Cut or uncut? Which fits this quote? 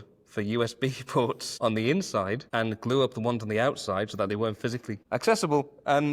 cut